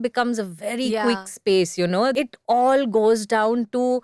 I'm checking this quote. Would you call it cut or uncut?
cut